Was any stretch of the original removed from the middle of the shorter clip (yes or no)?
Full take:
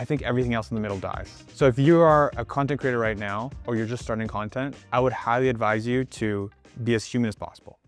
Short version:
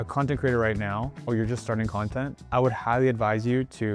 no